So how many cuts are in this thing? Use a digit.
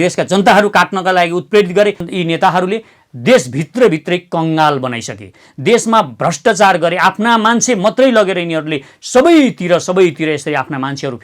1